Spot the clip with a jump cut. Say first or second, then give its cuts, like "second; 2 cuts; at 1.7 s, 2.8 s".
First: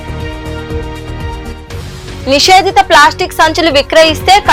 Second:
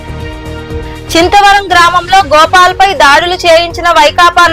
second; 1 cut; at 1.1 s